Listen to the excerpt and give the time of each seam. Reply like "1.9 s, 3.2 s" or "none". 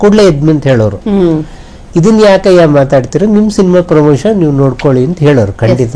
none